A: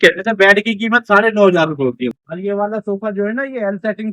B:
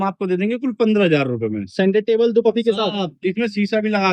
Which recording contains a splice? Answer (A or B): A